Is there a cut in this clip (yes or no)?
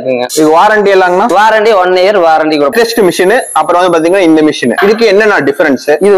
no